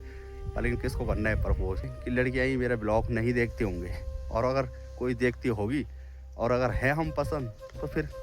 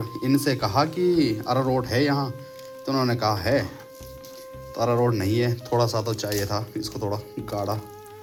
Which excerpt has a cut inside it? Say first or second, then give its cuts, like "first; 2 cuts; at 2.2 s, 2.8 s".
first; 1 cut; at 1.9 s